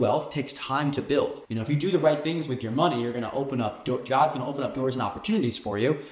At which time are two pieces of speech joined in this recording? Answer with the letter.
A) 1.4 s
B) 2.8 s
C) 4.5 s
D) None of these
A